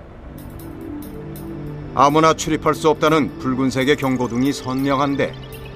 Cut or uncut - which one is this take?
cut